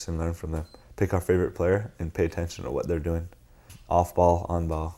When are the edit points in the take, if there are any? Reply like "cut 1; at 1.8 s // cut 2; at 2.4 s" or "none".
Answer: cut 1; at 3.7 s